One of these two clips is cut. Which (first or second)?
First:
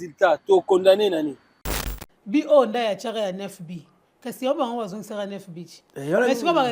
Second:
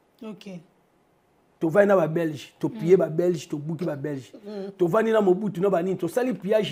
first